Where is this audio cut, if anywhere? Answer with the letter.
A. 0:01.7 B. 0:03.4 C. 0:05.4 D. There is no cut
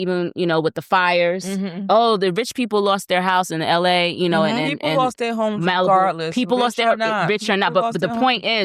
D